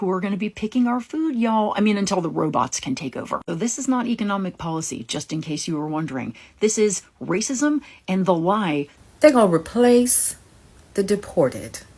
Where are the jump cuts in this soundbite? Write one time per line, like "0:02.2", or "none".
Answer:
0:08.9